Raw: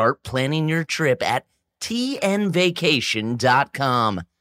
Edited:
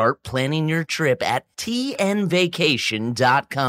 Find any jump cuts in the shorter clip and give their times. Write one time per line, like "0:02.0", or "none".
0:01.5